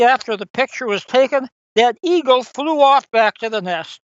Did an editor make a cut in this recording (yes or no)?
no